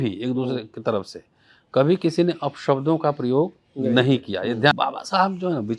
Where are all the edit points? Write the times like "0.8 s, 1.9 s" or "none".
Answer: 4.7 s